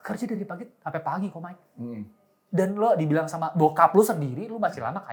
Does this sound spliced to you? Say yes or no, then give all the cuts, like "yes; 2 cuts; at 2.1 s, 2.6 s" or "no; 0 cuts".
no; 0 cuts